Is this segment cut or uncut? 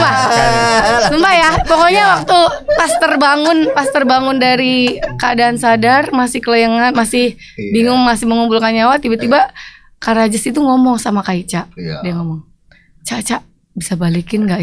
uncut